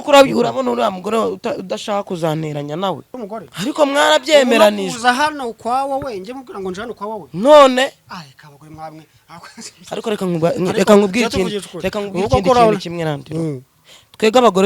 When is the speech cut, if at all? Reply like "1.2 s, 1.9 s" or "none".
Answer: 3.1 s